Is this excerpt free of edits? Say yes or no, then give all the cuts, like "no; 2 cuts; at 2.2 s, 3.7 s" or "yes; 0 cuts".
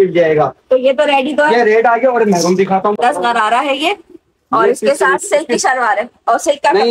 no; 1 cut; at 2.9 s